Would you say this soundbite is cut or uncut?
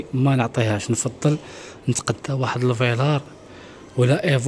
uncut